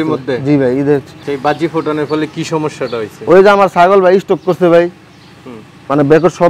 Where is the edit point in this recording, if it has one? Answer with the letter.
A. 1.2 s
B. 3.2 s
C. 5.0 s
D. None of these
A